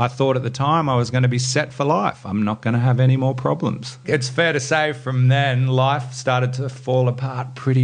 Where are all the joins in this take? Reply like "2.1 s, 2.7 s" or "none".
2.2 s, 4.0 s